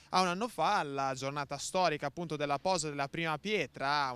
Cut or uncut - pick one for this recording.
cut